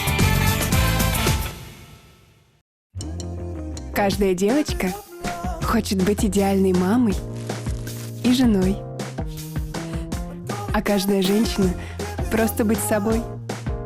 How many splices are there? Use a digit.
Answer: 1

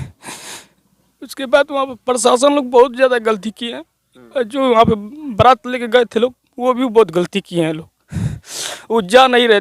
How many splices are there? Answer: 0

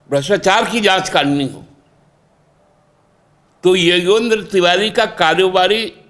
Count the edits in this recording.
1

